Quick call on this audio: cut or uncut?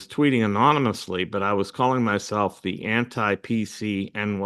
uncut